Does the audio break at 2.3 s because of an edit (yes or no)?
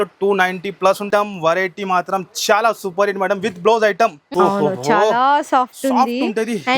no